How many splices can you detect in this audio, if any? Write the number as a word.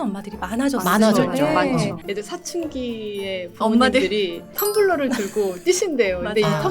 two